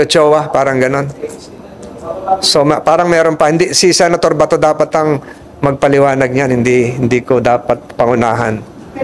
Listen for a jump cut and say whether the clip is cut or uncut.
uncut